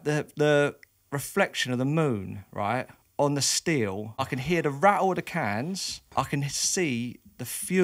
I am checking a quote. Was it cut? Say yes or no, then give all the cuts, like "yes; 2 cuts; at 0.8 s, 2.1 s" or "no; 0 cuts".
yes; 2 cuts; at 4.2 s, 6.0 s